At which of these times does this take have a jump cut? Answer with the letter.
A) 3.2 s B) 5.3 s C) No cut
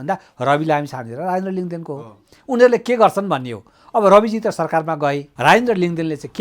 B